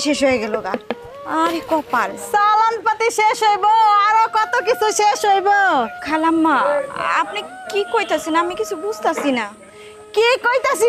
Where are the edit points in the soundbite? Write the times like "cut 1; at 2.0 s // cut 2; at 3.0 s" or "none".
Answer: cut 1; at 6.0 s